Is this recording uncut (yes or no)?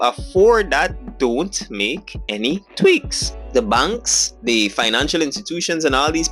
no